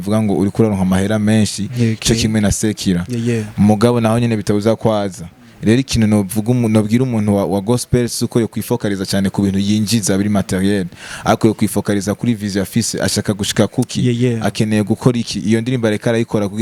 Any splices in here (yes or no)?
no